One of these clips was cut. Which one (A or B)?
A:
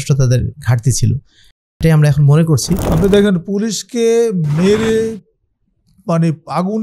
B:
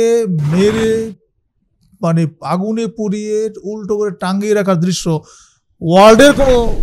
A